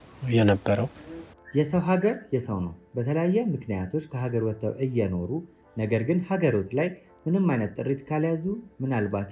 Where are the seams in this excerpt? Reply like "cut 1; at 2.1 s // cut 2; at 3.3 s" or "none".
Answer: cut 1; at 1.4 s